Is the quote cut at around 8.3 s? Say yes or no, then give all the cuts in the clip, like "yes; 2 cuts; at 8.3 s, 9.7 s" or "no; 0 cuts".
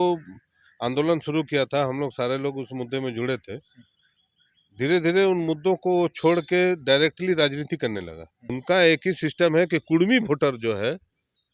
yes; 1 cut; at 8.3 s